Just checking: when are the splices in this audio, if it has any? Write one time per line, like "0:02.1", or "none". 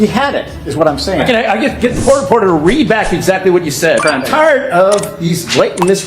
0:04.0